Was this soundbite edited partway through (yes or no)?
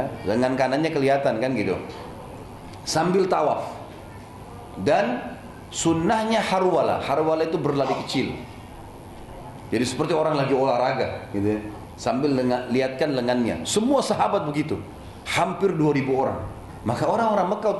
yes